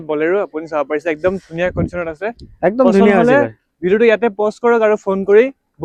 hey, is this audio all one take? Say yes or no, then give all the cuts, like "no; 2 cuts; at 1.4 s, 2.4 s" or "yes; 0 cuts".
yes; 0 cuts